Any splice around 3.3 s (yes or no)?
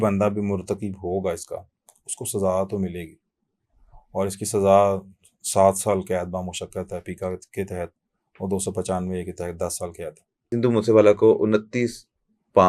no